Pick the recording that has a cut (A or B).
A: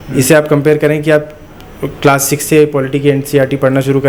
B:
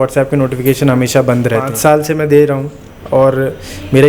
B